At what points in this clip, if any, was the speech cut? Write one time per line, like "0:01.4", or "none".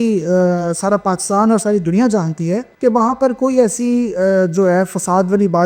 0:02.7